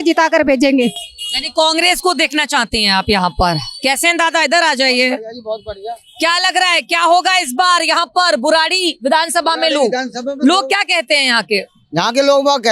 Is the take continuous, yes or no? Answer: yes